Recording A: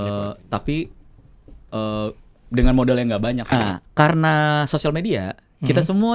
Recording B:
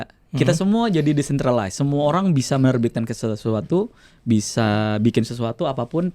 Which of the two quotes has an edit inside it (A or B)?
A